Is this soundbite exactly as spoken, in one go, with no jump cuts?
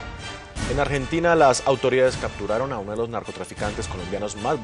yes; 0 cuts

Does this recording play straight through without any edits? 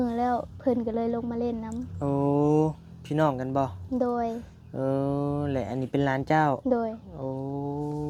yes; 0 cuts

